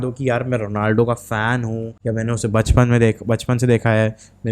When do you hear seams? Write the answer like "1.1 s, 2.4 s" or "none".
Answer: 1.9 s